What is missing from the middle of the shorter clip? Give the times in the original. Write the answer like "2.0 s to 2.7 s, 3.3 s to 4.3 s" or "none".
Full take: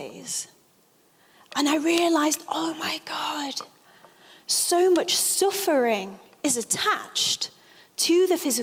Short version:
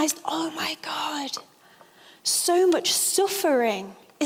none